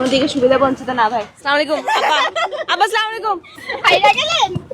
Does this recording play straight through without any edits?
no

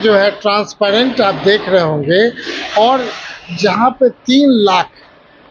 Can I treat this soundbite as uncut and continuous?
yes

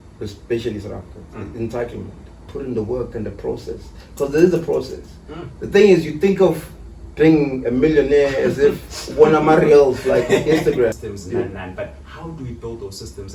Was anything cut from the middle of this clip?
yes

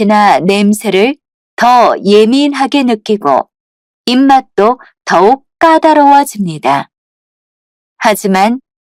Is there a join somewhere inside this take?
no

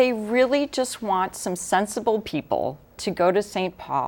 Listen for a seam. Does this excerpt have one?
no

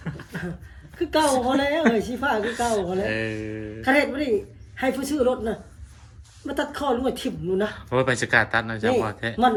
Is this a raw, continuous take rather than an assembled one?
yes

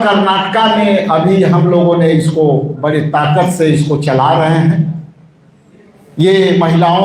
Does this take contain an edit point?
no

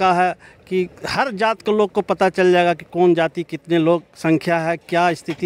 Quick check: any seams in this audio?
no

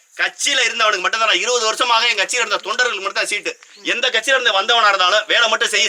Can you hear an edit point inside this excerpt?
no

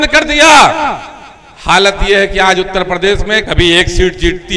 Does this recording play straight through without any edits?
no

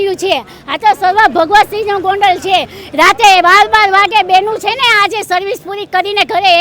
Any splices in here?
no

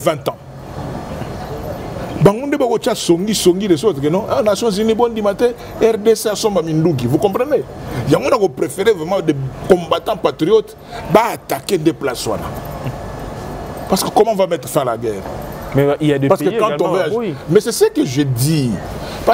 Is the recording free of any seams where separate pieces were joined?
yes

